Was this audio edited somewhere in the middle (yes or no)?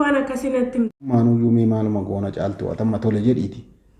yes